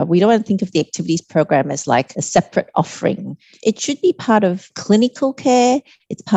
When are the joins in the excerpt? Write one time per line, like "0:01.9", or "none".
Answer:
0:02.2
0:03.6
0:04.7